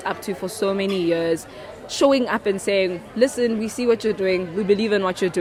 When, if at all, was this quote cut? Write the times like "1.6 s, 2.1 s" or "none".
none